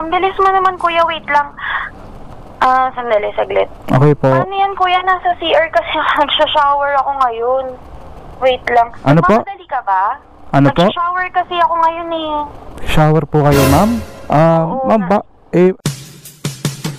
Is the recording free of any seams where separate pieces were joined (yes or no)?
no